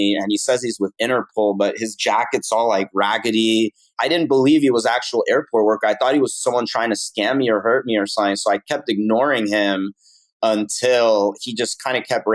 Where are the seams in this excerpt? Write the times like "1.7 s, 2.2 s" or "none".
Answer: none